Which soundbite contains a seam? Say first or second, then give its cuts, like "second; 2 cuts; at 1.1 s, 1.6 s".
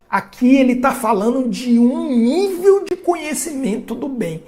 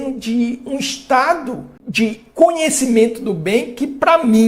second; 1 cut; at 1.8 s